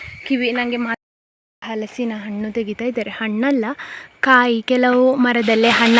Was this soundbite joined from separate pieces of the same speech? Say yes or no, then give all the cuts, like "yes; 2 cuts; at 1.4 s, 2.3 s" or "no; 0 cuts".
yes; 1 cut; at 1.0 s